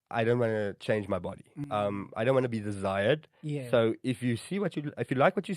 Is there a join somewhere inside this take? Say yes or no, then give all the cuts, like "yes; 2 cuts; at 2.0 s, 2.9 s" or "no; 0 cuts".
no; 0 cuts